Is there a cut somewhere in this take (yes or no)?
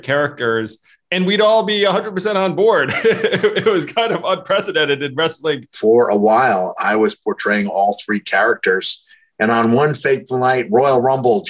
yes